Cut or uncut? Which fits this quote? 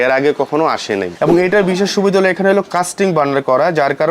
cut